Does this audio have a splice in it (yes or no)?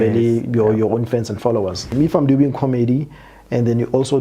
yes